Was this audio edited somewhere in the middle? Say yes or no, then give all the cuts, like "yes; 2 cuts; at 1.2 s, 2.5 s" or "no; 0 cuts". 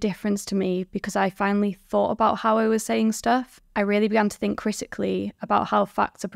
yes; 1 cut; at 3.6 s